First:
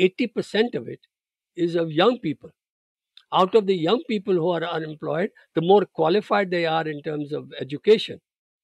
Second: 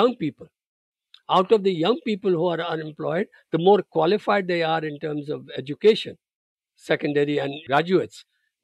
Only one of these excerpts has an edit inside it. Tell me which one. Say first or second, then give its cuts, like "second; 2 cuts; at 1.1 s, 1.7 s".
second; 1 cut; at 7.6 s